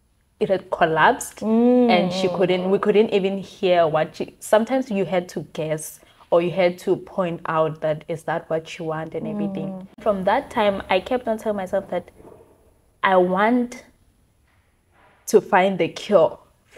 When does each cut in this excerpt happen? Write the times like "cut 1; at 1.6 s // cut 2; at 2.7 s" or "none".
cut 1; at 10.0 s